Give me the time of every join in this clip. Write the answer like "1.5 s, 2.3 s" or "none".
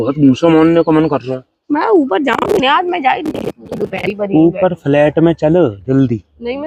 none